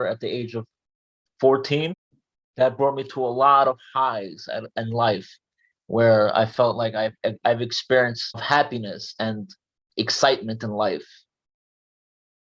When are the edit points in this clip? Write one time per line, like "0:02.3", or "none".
0:02.0
0:08.4